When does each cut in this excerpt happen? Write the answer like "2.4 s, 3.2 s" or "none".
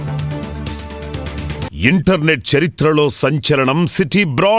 1.7 s